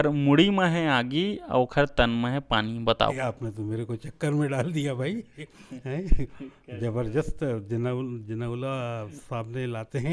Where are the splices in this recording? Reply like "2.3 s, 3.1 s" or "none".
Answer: 3.2 s